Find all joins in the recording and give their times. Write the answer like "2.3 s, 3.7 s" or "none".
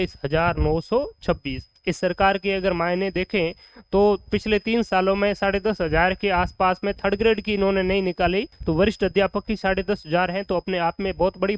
1.7 s, 8.5 s, 9.6 s